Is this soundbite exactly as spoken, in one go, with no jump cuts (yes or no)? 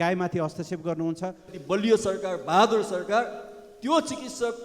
no